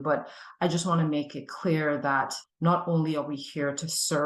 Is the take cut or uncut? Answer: cut